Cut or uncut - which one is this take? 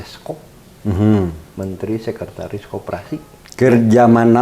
uncut